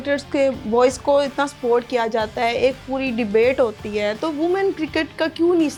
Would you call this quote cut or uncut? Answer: uncut